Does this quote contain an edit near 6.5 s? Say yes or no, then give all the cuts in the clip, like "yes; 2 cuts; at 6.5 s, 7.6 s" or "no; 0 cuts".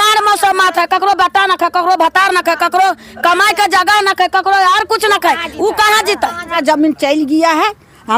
yes; 1 cut; at 6.5 s